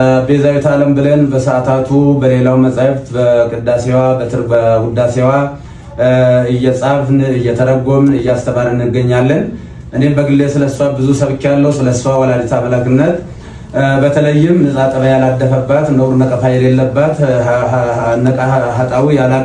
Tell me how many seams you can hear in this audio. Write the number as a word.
zero